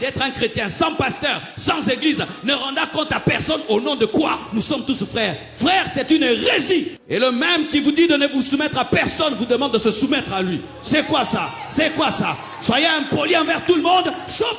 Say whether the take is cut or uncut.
cut